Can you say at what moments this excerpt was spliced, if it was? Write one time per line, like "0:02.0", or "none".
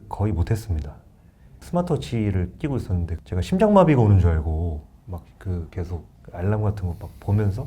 0:01.6
0:03.2